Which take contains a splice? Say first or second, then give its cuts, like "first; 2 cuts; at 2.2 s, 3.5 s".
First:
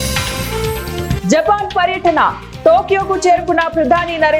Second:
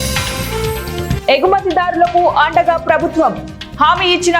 second; 1 cut; at 1.1 s